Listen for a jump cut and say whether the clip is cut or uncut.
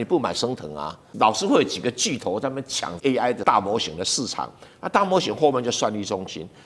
cut